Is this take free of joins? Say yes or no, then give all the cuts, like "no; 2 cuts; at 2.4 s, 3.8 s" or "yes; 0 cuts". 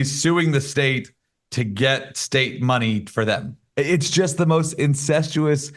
yes; 0 cuts